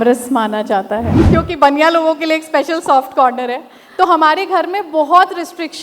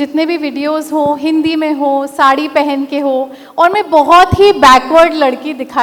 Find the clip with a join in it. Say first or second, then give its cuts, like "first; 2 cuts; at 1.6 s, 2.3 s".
first; 1 cut; at 1.2 s